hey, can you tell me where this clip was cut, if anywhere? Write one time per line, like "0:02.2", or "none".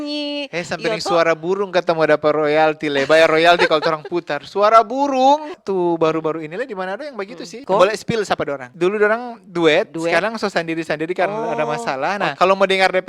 0:05.6
0:07.5
0:08.6
0:12.3